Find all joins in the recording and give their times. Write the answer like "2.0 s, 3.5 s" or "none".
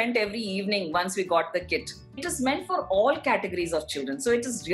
2.2 s